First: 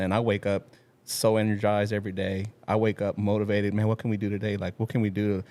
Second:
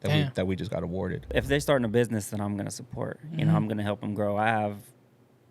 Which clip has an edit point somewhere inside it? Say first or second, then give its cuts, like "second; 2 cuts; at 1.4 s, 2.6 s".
second; 1 cut; at 1.3 s